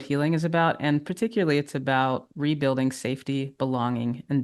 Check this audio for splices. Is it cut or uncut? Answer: uncut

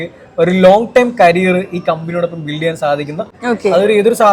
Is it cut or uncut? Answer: cut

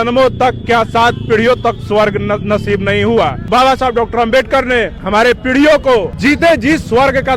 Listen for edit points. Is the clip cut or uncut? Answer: cut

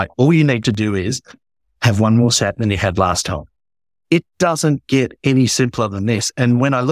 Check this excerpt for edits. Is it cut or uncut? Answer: uncut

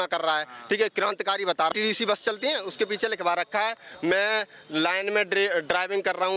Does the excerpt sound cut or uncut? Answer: cut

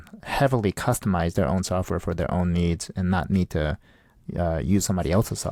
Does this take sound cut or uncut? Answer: uncut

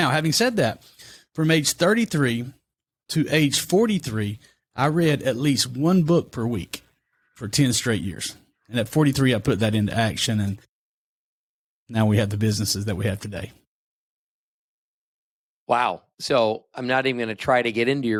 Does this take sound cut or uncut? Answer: uncut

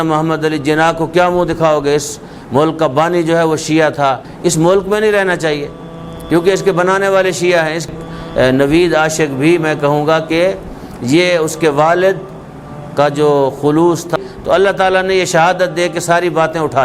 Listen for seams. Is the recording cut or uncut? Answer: cut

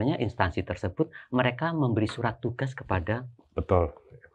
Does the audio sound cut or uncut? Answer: uncut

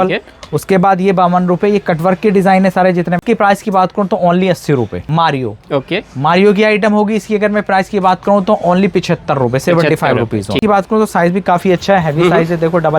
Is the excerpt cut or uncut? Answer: cut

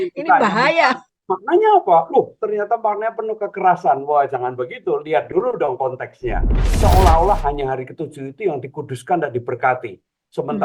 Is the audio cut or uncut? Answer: cut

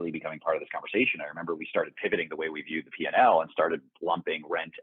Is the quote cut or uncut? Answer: uncut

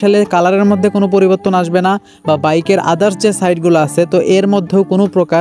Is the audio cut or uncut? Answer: uncut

